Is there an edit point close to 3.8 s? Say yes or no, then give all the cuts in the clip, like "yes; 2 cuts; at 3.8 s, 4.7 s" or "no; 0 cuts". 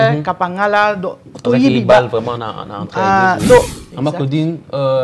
yes; 1 cut; at 3.8 s